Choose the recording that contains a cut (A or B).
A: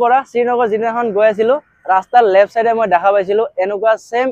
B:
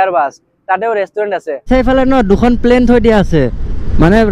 B